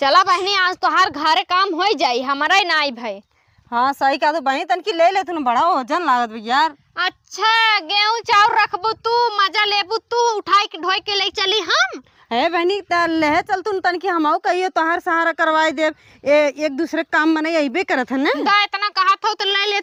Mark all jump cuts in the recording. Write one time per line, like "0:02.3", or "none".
none

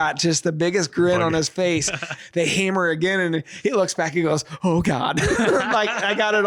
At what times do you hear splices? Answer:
0:02.2

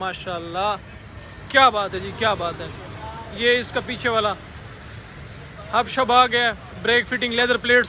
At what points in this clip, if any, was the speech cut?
none

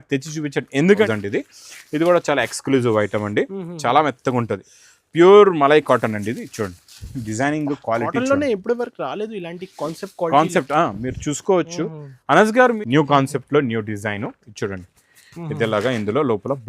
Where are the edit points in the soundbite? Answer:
0:01.1
0:12.8

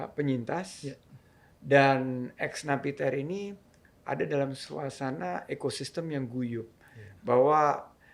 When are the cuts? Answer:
none

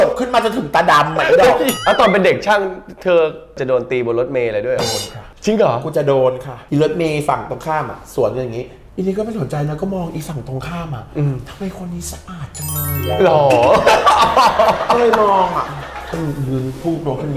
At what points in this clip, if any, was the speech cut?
0:01.7
0:03.6
0:06.5
0:08.8
0:16.0

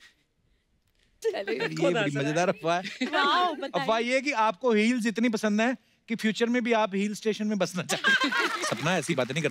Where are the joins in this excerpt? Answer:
0:08.6

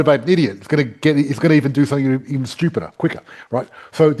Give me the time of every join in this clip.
none

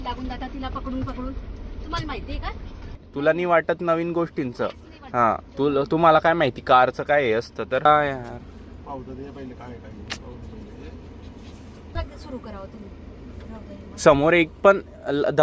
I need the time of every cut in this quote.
0:03.0
0:07.9
0:12.0

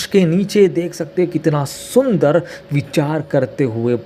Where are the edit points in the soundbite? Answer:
none

